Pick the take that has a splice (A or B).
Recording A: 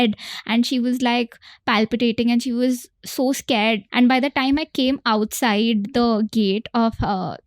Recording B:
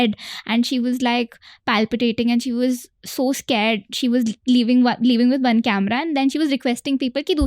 A